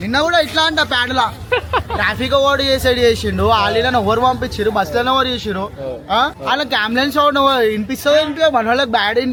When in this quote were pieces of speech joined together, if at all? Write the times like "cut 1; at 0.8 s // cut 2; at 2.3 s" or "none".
none